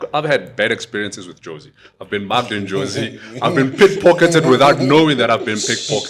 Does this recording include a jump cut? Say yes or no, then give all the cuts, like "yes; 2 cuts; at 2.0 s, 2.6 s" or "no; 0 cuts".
no; 0 cuts